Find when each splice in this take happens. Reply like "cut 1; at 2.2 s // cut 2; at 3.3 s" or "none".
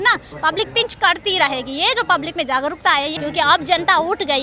cut 1; at 3.2 s

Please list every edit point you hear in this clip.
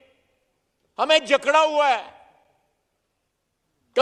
none

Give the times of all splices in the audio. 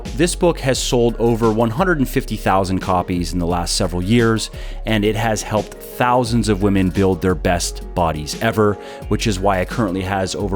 none

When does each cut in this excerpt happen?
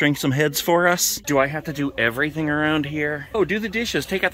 cut 1; at 3.4 s

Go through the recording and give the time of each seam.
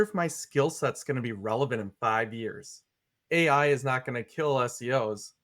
cut 1; at 2.9 s

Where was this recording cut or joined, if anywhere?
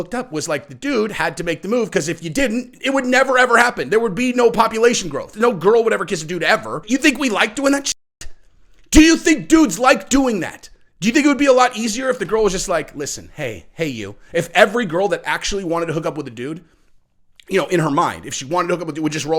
cut 1; at 5.3 s // cut 2; at 6.8 s

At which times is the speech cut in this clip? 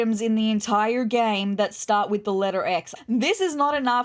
cut 1; at 2.9 s

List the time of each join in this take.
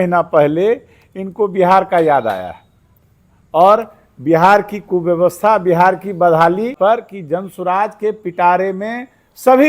cut 1; at 6.7 s

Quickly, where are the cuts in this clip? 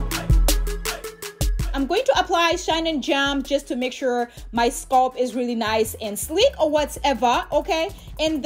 cut 1; at 1.6 s

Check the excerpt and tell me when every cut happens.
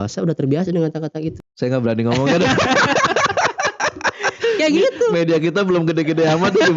cut 1; at 1.4 s

